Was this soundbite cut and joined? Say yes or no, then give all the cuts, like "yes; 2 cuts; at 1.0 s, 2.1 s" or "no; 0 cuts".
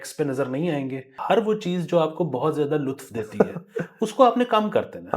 yes; 1 cut; at 1.2 s